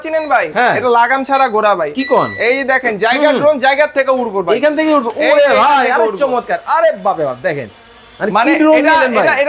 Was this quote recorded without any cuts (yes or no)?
yes